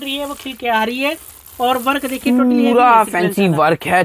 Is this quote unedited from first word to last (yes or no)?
yes